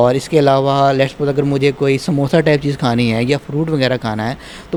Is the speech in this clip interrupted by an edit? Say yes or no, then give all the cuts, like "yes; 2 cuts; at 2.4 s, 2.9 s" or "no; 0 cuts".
no; 0 cuts